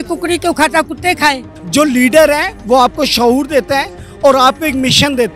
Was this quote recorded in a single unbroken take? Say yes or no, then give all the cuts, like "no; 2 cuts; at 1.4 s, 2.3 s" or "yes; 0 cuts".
no; 1 cut; at 1.5 s